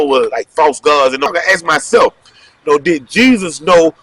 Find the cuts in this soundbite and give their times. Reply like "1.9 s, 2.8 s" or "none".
1.3 s